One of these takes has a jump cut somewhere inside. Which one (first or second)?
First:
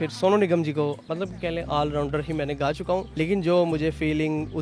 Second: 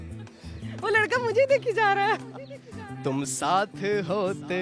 first